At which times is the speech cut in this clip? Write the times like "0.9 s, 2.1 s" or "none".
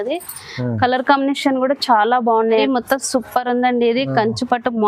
2.6 s